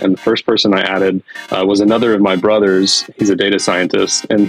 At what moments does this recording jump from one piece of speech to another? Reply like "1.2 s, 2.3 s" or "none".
none